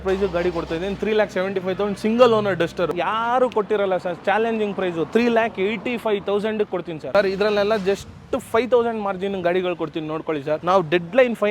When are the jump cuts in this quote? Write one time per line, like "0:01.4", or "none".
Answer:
0:02.9
0:07.0
0:10.6